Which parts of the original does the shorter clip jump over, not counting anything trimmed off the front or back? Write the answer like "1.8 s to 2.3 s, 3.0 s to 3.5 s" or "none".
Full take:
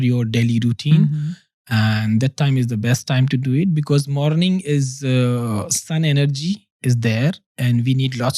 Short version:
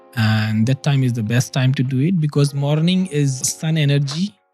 5.0 s to 5.7 s

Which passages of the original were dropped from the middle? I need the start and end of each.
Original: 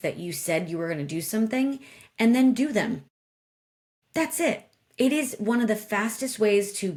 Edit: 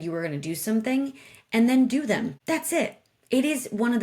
3.0 s to 4.0 s

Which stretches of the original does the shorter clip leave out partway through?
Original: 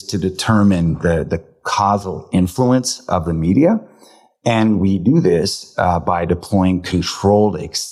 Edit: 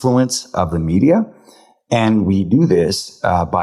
none

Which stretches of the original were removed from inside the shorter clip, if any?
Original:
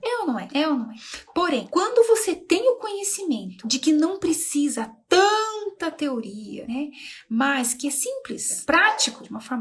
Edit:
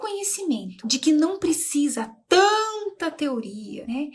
none

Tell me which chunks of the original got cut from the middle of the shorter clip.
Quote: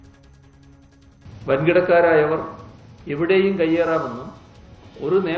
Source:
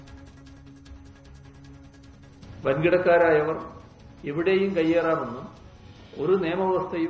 2.4 s to 2.6 s

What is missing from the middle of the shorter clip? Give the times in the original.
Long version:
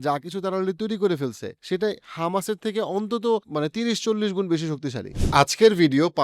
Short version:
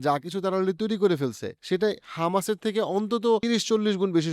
3.4 s to 3.8 s

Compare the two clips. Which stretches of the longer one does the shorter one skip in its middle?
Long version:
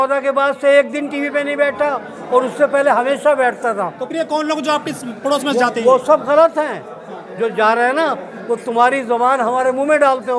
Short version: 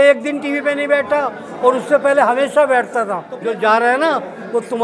3.9 s to 7.2 s

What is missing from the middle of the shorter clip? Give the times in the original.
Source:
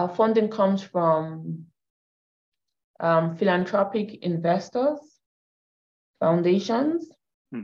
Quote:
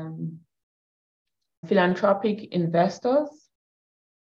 2.9 s to 3.3 s

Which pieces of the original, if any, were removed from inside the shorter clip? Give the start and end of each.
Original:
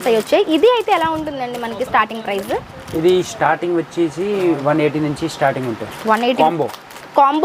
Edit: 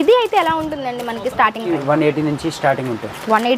2.2 s to 4.4 s

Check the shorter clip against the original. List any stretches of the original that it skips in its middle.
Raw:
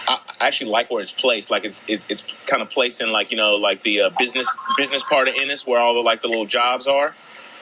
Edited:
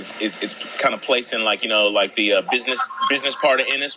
none

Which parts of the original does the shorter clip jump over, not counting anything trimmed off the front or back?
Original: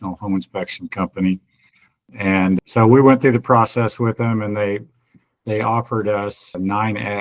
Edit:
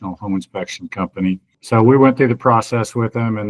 1.6 s to 2.7 s

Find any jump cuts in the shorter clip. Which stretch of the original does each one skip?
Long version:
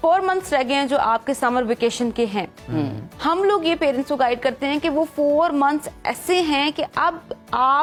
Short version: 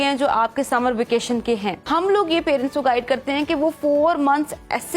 2.5 s to 3.1 s

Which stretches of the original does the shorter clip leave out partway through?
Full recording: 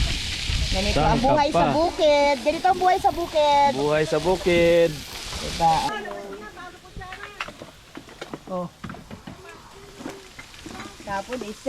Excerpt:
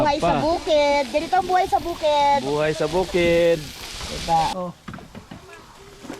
5.8 s to 8.5 s

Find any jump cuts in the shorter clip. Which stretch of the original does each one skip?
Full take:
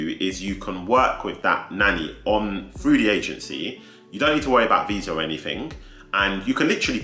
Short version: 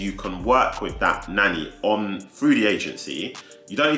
none

